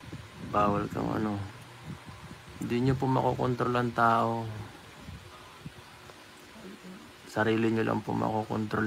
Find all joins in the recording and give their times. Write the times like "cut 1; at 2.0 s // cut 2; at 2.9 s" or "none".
none